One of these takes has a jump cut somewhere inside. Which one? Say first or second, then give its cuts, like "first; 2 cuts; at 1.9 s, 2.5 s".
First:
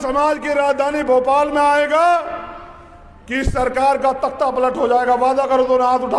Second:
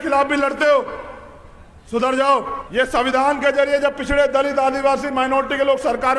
second; 1 cut; at 2.6 s